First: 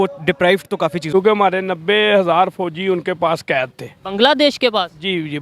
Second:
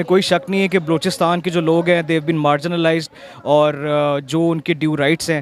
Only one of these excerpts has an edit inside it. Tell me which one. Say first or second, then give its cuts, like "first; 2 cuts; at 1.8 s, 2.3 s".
first; 1 cut; at 1.0 s